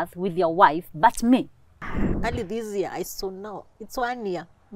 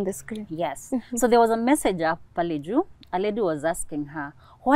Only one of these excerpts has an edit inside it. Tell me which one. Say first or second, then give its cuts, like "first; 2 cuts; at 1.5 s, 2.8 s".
first; 1 cut; at 2.1 s